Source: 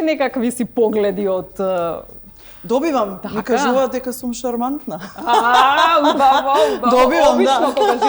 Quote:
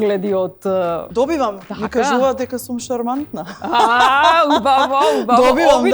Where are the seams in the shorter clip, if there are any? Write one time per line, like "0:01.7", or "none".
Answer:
0:01.0